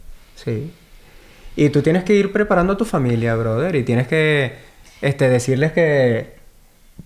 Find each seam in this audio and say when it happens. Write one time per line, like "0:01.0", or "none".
none